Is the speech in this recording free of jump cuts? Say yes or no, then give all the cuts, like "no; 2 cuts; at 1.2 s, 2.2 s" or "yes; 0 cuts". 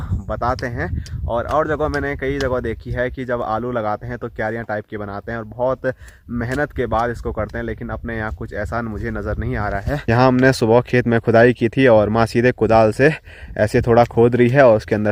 yes; 0 cuts